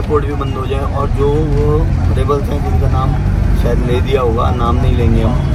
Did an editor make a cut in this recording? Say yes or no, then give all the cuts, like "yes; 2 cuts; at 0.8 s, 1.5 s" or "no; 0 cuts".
no; 0 cuts